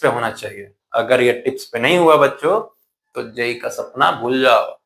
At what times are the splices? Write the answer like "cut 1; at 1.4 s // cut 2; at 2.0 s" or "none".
none

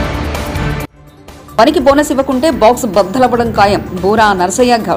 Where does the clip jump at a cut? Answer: cut 1; at 0.9 s

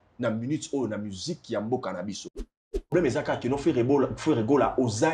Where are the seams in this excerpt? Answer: cut 1; at 2.9 s

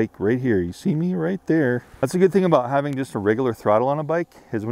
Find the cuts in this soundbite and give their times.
cut 1; at 1.9 s

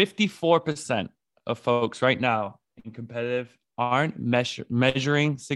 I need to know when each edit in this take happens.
none

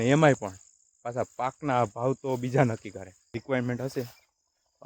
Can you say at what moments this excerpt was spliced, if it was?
cut 1; at 3.4 s

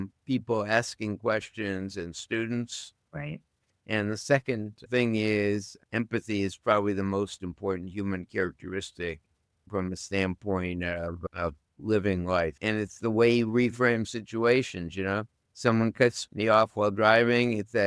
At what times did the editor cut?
cut 1; at 4.8 s // cut 2; at 5.8 s // cut 3; at 9.7 s // cut 4; at 11.2 s

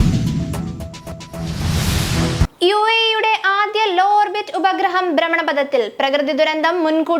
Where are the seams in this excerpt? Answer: cut 1; at 1.3 s

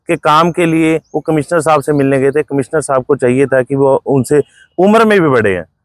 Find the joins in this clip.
none

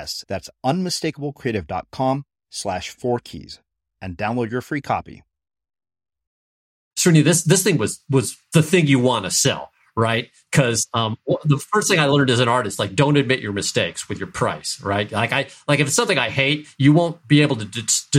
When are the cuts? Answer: cut 1; at 6.9 s // cut 2; at 8.4 s

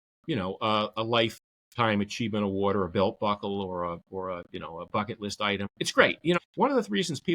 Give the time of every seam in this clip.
cut 1; at 5.6 s // cut 2; at 6.4 s

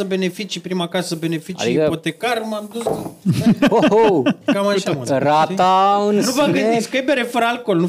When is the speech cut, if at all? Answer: none

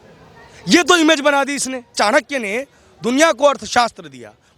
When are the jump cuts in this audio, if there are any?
cut 1; at 1.9 s

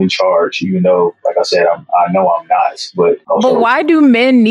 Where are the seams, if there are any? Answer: none

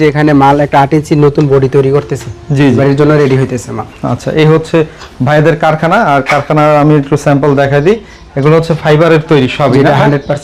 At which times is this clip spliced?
none

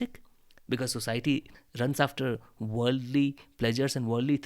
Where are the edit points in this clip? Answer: cut 1; at 1.6 s

